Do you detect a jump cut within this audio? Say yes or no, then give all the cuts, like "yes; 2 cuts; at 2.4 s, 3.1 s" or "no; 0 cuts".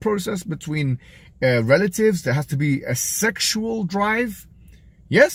no; 0 cuts